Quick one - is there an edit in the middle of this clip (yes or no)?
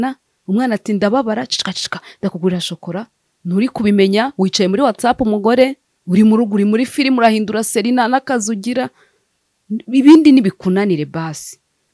yes